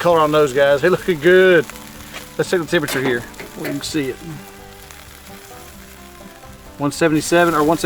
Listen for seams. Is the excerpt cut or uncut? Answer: uncut